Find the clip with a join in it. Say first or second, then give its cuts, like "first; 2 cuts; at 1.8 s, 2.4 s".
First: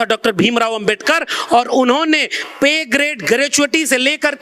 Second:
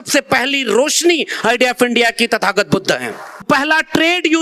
second; 1 cut; at 3.5 s